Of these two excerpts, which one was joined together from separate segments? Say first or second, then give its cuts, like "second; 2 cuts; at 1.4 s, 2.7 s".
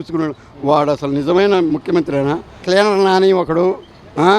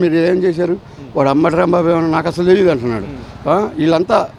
first; 1 cut; at 2.6 s